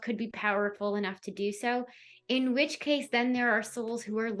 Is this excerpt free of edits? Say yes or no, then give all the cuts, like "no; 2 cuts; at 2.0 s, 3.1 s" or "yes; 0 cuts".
yes; 0 cuts